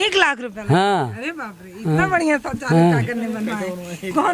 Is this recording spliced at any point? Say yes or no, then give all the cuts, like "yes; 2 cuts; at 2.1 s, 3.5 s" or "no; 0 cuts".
no; 0 cuts